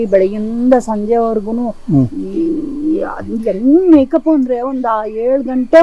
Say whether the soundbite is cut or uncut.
uncut